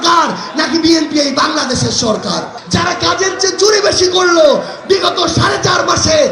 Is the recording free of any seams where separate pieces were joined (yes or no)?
no